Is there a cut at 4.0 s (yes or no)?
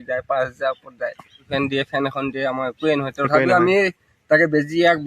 no